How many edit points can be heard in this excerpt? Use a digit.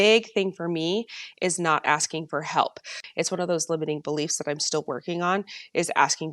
1